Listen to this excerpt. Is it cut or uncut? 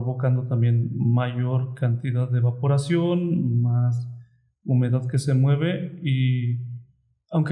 uncut